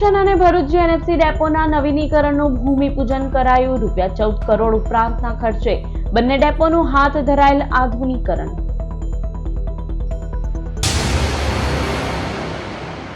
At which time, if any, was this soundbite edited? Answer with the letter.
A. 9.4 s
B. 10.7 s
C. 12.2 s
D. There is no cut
B